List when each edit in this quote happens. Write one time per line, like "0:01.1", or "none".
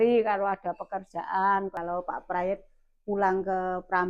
0:01.7